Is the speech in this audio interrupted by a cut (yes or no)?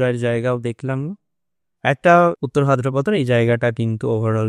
yes